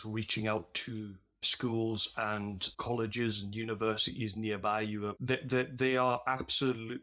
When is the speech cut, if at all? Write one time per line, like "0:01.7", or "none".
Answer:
0:05.2